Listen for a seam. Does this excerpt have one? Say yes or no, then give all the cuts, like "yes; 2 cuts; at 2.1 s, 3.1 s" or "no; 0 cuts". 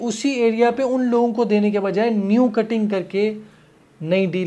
no; 0 cuts